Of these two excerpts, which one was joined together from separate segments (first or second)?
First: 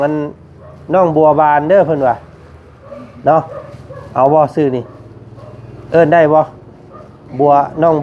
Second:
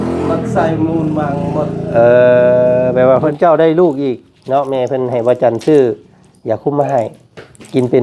second